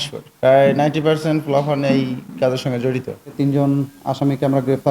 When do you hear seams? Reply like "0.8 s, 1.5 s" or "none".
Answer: 3.3 s